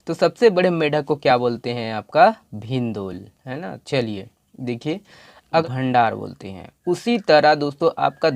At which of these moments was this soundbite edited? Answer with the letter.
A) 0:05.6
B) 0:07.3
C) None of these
A